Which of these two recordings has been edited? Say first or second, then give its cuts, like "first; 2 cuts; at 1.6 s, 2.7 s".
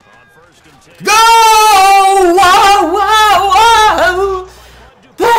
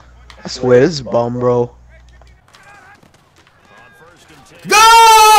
second; 1 cut; at 2.0 s